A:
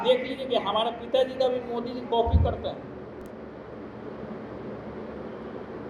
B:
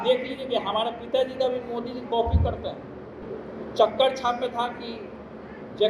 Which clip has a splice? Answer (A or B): B